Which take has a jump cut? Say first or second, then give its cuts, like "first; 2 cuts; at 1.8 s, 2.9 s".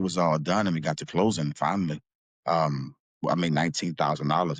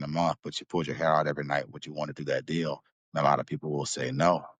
second; 1 cut; at 2.9 s